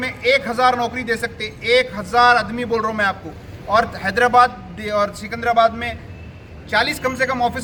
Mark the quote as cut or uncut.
uncut